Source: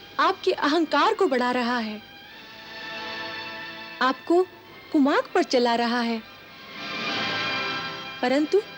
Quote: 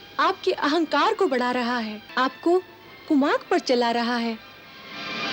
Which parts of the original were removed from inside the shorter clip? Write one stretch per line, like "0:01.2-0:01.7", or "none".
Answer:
0:02.0-0:03.8